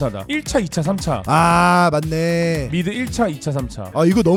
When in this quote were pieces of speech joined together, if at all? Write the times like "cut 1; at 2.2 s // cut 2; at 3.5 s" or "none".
none